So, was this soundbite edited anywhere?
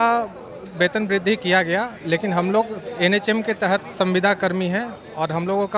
no; 0 cuts

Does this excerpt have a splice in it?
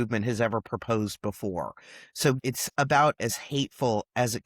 yes; 1 cut; at 2.4 s

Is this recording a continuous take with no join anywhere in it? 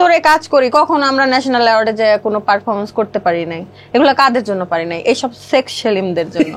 yes; 0 cuts

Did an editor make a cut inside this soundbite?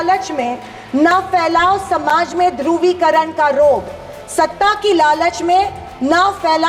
no; 0 cuts

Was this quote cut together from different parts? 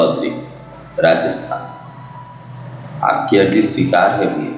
no; 0 cuts

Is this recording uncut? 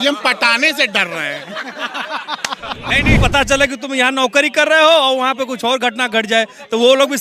no; 1 cut; at 3.2 s

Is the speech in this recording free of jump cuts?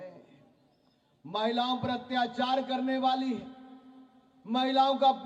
yes; 0 cuts

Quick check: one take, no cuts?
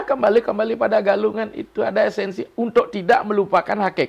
yes; 0 cuts

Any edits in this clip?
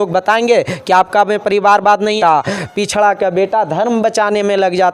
yes; 1 cut; at 2.2 s

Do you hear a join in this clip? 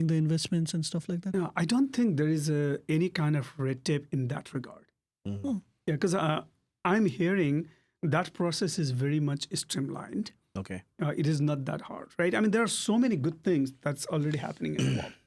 no; 0 cuts

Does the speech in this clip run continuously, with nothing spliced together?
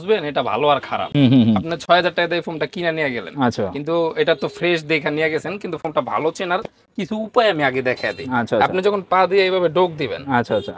yes; 0 cuts

